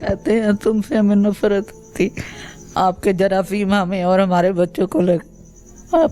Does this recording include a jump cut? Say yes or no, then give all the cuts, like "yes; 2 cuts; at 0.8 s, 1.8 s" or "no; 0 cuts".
no; 0 cuts